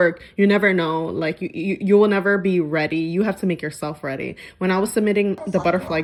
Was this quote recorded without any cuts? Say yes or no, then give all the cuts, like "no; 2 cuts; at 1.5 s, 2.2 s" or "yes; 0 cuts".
yes; 0 cuts